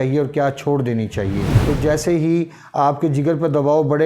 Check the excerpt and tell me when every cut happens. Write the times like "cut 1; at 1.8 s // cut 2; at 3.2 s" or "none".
cut 1; at 1.5 s